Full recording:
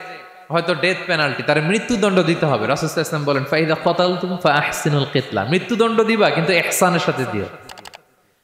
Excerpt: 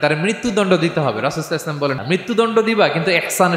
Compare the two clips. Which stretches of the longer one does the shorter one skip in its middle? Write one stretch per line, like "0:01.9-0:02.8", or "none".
0:03.5-0:05.4